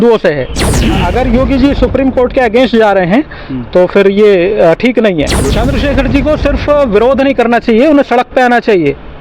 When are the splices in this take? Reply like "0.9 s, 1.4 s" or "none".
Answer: 0.8 s, 5.4 s